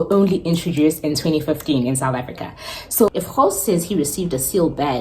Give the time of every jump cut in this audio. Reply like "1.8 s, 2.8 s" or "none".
3.1 s